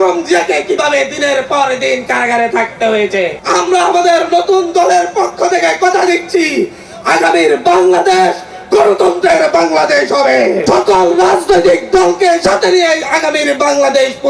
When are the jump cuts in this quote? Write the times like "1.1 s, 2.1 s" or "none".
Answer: 3.4 s, 10.6 s